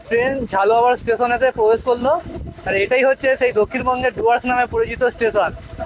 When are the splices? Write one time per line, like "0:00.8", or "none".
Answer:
none